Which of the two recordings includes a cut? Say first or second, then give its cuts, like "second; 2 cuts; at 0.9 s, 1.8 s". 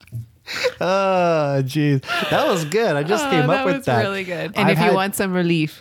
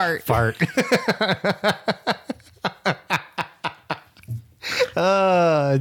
first; 1 cut; at 4.5 s